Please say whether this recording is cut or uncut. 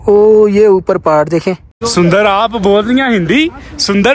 cut